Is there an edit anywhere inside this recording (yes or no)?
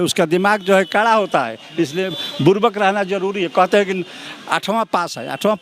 no